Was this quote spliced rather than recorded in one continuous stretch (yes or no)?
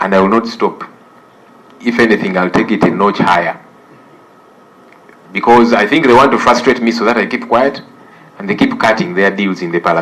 no